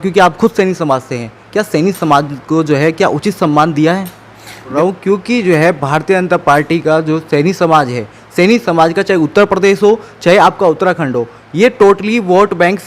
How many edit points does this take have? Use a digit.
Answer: 1